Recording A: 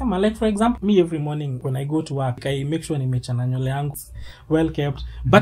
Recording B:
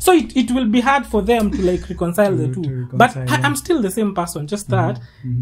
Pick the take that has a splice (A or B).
A